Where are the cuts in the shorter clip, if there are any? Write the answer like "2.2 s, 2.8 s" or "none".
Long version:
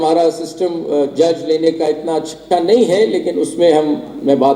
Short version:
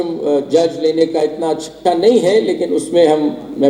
none